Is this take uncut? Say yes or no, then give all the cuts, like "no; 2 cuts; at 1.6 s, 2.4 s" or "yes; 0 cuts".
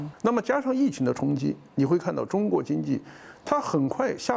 yes; 0 cuts